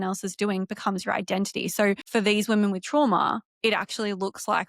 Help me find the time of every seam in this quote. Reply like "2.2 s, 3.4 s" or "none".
2.0 s